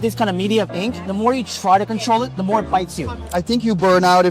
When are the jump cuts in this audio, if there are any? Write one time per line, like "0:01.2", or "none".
0:01.0
0:03.2